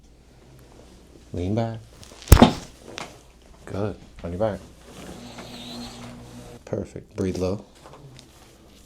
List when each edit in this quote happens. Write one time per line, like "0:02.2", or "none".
0:06.5

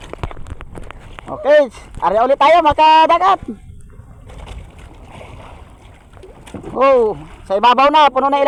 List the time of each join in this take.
none

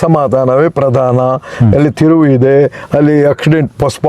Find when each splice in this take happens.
none

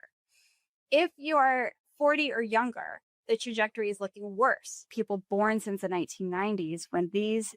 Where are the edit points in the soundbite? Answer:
0:04.8

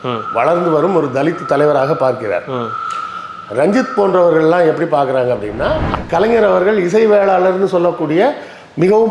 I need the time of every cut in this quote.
0:05.9

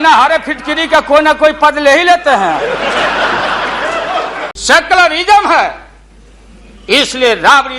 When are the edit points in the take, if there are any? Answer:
0:04.5

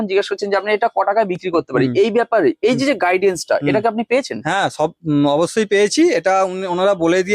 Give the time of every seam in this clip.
none

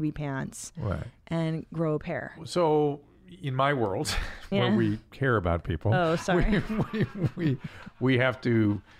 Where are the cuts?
0:02.4

